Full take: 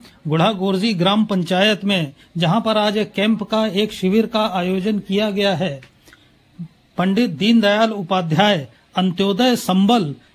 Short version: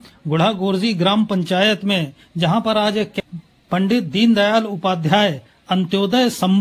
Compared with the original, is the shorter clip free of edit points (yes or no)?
no